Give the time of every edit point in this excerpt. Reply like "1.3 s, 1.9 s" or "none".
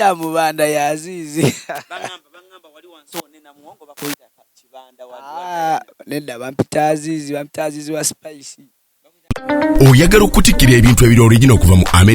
9.2 s